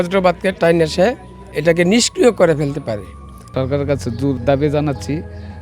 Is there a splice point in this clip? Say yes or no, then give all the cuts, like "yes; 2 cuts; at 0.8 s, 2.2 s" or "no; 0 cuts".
yes; 2 cuts; at 1.5 s, 3.5 s